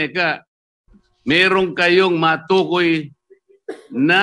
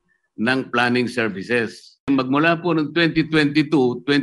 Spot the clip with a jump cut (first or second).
second